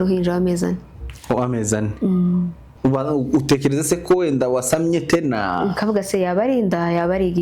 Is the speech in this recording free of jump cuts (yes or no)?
no